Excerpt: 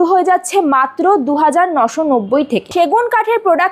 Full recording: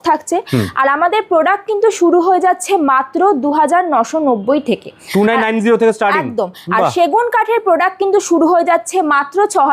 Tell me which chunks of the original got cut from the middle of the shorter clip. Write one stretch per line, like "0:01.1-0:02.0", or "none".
0:04.9-0:06.9